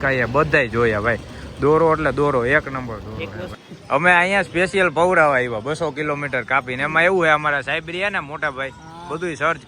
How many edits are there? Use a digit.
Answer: 1